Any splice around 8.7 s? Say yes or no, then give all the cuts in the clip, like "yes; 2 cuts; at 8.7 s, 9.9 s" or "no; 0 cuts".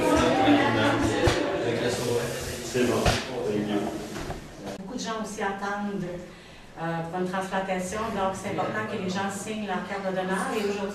no; 1 cut; at 4.8 s